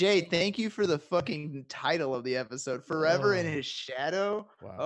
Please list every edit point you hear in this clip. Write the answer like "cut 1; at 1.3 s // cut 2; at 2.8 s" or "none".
none